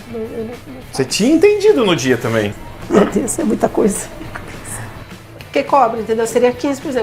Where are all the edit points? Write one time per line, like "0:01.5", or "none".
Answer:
0:02.5
0:05.0